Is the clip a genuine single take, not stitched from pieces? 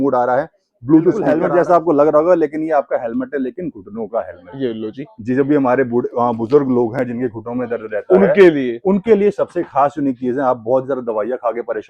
no; 1 cut; at 1.4 s

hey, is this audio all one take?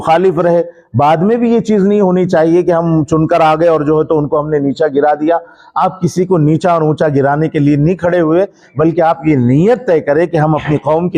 yes; 0 cuts

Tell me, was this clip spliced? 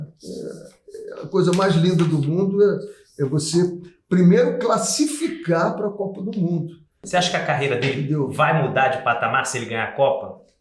yes; 1 cut; at 7.0 s

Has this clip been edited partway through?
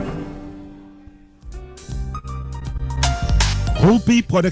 yes; 1 cut; at 1.6 s

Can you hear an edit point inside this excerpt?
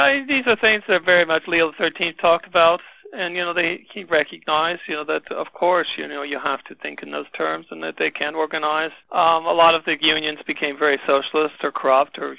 yes; 1 cut; at 9.0 s

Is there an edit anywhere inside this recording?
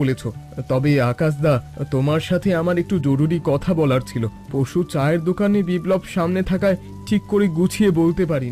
no; 0 cuts

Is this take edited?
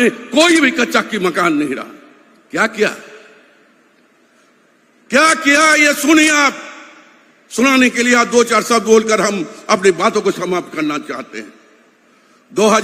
no; 0 cuts

